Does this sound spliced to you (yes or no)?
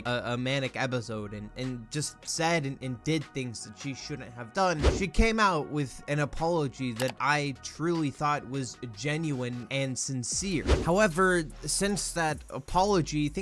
no